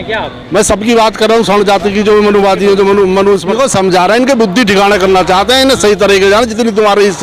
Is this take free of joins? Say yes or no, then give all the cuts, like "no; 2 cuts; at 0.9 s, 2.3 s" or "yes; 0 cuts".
no; 1 cut; at 3.5 s